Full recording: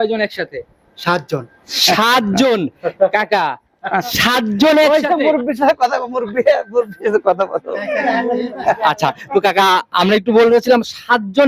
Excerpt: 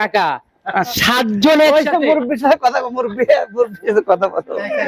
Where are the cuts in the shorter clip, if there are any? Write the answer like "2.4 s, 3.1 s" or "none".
none

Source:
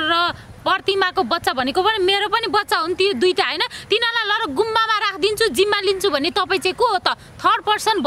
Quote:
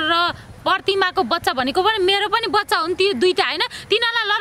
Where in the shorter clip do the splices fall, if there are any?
none

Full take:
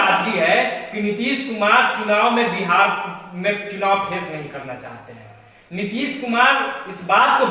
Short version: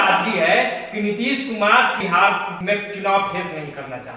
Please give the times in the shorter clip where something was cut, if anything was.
2.1 s

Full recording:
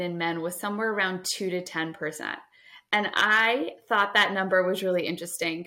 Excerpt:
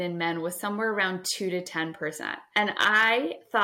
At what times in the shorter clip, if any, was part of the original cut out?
2.3 s

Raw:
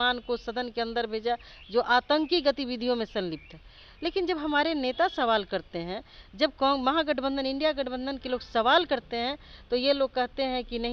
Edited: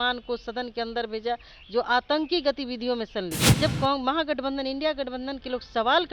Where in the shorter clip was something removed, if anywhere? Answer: 3.4 s

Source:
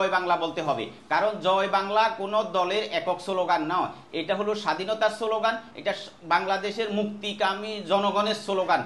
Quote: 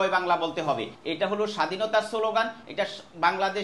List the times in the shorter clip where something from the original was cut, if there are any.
0.9 s

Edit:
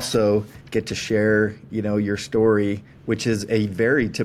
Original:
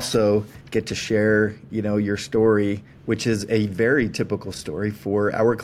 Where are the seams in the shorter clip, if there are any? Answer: none

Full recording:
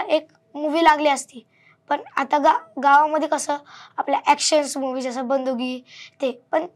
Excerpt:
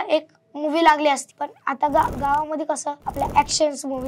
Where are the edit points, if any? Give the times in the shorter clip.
1.9 s, 3.0 s

